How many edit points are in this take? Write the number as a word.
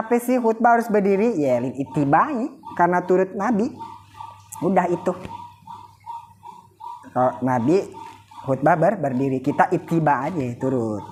zero